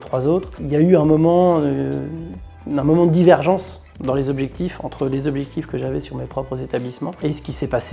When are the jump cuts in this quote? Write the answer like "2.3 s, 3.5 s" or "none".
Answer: none